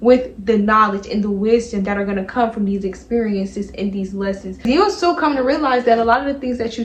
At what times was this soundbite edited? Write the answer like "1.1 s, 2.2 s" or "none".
4.6 s